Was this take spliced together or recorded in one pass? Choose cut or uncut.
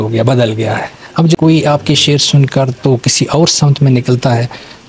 cut